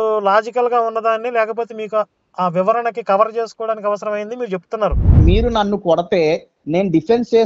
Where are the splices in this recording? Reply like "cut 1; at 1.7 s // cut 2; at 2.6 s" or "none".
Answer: cut 1; at 5.1 s